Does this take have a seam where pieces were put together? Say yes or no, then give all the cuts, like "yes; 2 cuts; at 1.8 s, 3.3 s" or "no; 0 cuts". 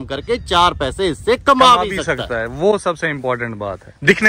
no; 0 cuts